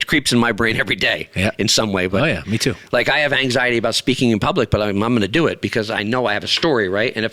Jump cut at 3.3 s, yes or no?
no